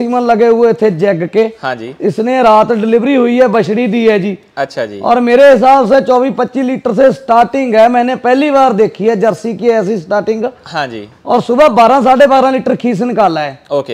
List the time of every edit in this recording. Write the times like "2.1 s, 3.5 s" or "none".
none

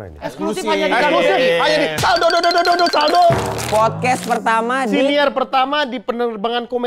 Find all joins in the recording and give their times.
3.6 s

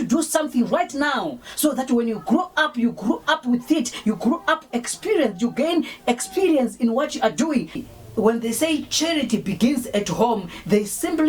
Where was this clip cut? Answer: 7.7 s

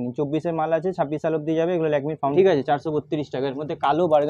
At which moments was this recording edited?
2.3 s

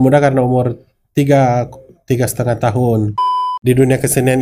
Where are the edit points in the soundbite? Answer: 3.4 s

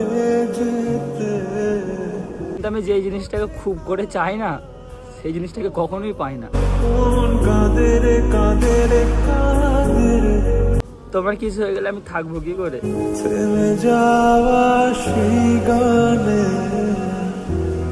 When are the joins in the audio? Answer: 2.6 s, 10.8 s

